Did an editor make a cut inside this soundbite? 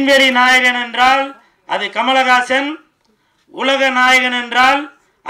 no; 0 cuts

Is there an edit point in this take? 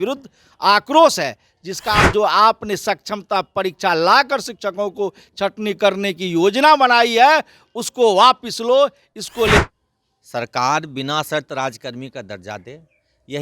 yes; 2 cuts; at 2.0 s, 9.6 s

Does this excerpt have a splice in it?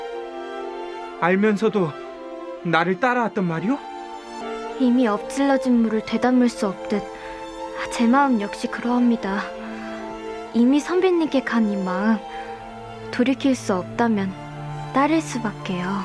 yes; 1 cut; at 4.4 s

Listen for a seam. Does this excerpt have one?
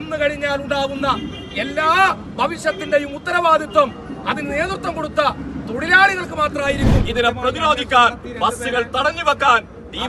yes; 1 cut; at 7.0 s

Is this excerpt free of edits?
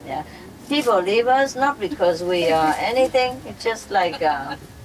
yes; 0 cuts

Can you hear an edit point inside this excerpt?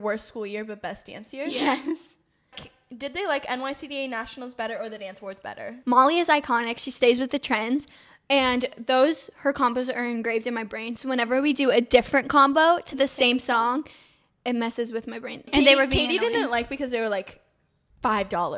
yes; 3 cuts; at 2.7 s, 5.7 s, 15.5 s

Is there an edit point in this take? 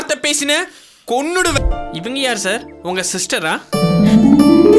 yes; 1 cut; at 1.6 s

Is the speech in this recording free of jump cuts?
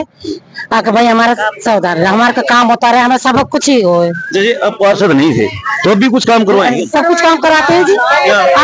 yes; 0 cuts

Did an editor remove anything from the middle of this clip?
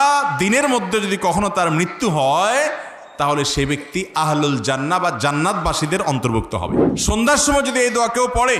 yes; 1 cut; at 6.9 s

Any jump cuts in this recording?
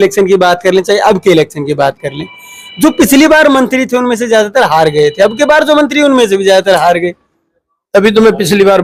no; 0 cuts

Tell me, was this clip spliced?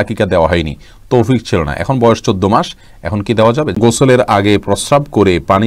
yes; 1 cut; at 3.8 s

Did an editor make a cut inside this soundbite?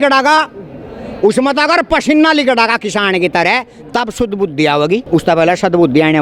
yes; 1 cut; at 5.0 s

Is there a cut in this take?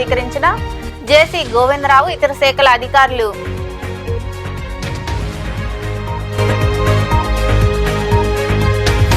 yes; 2 cuts; at 6.4 s, 7.9 s

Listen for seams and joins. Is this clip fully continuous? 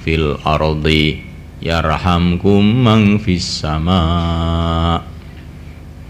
yes; 0 cuts

